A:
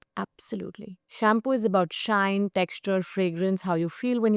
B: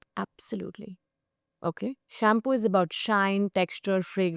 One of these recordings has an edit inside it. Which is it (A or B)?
A